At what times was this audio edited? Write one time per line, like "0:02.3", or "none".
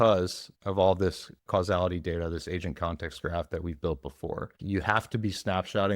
0:01.4
0:04.6